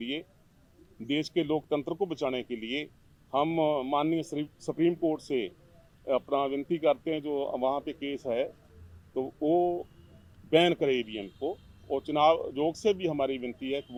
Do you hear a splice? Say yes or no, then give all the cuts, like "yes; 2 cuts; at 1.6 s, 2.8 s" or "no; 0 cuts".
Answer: no; 0 cuts